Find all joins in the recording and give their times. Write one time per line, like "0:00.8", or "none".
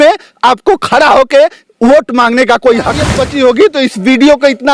0:03.2